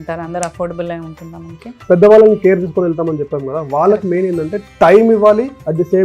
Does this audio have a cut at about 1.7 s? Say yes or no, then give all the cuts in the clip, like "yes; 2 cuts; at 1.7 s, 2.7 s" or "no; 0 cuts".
yes; 1 cut; at 1.7 s